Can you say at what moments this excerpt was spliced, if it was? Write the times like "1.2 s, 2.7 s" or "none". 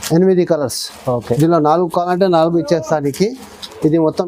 none